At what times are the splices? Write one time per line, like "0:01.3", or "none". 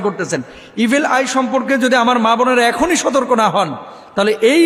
none